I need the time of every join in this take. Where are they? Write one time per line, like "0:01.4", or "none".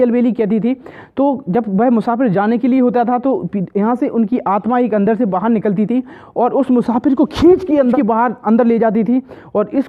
0:07.9